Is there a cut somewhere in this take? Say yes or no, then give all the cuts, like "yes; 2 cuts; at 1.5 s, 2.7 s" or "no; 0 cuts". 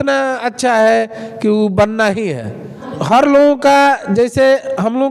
no; 0 cuts